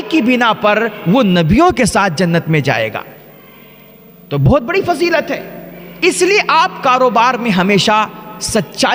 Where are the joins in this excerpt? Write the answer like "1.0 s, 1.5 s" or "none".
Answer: none